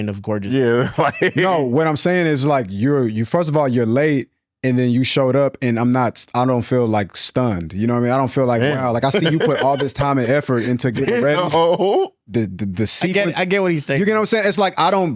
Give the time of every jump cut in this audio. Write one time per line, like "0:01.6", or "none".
none